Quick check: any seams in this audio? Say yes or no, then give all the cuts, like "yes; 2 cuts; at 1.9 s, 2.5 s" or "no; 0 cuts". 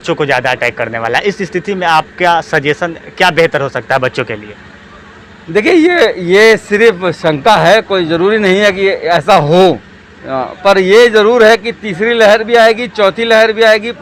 no; 0 cuts